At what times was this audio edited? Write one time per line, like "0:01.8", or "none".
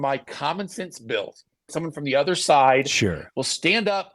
0:01.7